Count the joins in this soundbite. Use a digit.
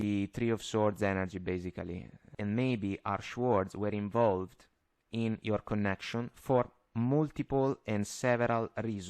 1